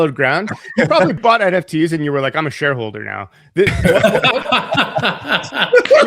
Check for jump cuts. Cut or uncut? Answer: cut